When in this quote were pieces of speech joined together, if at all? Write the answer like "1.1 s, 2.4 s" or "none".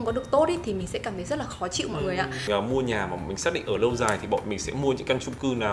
2.4 s